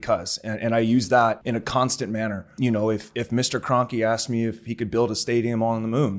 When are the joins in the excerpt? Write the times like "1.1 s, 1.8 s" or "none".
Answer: 1.4 s, 2.5 s